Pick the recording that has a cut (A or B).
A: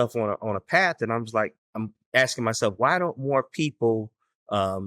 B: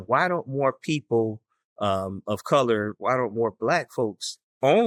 A